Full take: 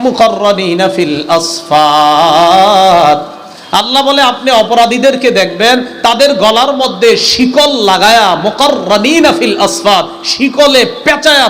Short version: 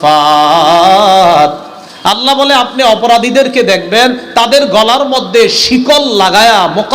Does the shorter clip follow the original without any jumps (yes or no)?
yes